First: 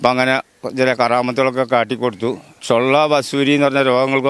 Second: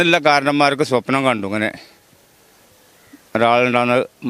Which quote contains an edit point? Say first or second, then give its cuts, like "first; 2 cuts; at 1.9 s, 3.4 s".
first; 1 cut; at 2.5 s